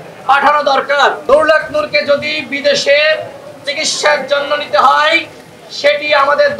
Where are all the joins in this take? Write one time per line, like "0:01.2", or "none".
0:01.2

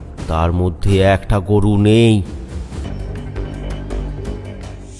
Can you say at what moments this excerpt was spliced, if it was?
0:03.2

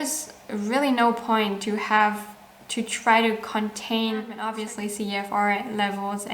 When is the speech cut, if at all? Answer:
0:04.6

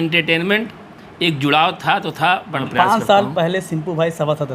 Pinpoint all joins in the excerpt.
0:02.6

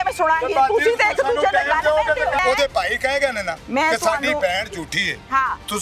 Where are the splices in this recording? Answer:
0:02.4
0:03.5

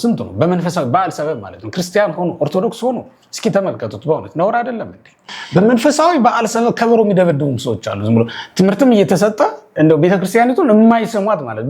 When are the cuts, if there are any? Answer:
0:05.3

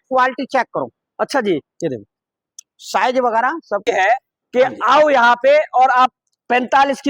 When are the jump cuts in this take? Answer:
0:03.8

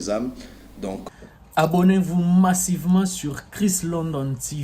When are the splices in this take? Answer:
0:01.0

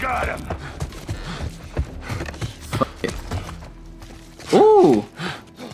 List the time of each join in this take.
0:01.0

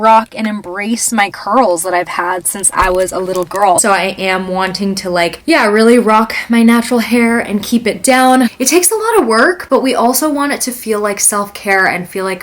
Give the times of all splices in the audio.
0:03.8
0:08.5

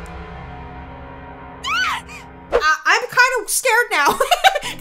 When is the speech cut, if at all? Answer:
0:02.6

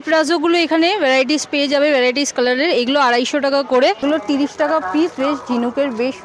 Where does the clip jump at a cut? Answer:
0:04.0

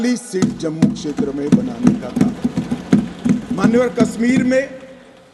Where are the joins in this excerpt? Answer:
none

